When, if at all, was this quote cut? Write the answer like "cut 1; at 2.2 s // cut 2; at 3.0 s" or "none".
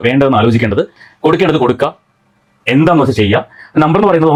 none